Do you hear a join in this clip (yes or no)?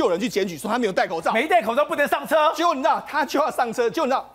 no